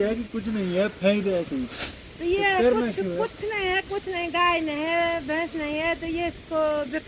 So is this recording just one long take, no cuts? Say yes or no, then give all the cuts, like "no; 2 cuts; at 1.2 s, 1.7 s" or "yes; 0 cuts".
yes; 0 cuts